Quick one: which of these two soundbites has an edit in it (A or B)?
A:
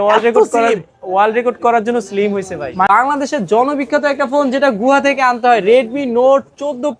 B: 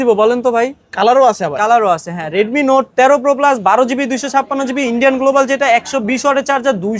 A